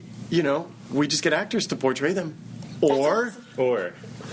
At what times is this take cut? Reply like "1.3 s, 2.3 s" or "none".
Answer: none